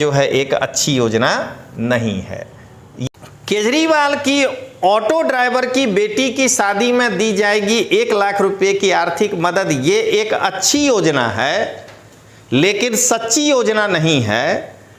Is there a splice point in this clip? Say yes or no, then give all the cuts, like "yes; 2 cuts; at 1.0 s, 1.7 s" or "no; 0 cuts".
yes; 1 cut; at 3.1 s